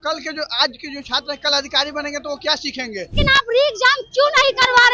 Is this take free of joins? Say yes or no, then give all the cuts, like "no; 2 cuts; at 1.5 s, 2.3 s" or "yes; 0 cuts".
no; 1 cut; at 3.1 s